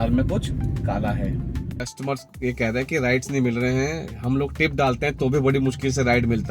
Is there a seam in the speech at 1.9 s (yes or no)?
yes